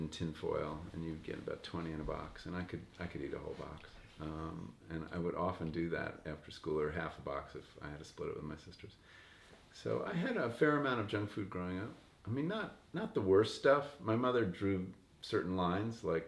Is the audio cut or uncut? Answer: uncut